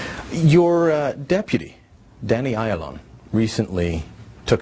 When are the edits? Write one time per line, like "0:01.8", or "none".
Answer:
0:02.2